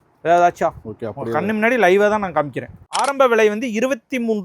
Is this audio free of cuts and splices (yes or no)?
no